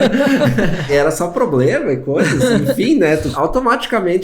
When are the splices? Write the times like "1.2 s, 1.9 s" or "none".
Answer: 0.9 s, 3.3 s